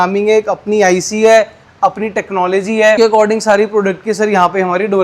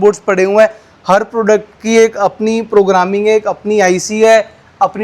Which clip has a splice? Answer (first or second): first